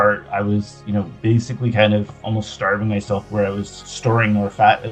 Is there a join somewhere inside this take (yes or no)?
no